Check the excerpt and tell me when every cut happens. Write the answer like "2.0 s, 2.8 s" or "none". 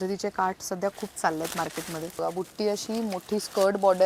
2.2 s